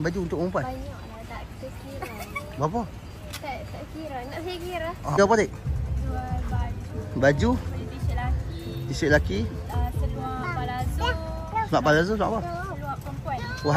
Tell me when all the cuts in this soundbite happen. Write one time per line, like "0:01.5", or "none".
0:05.2